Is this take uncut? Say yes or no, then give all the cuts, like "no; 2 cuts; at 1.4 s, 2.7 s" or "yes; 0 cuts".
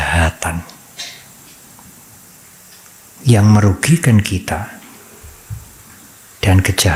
yes; 0 cuts